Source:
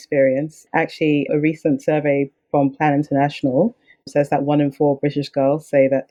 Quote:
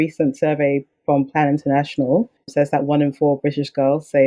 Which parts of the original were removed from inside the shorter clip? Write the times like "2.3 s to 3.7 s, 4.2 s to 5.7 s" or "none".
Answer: 3.8 s to 4.0 s